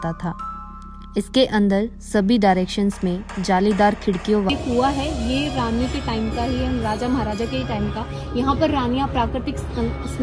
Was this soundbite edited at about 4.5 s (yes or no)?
yes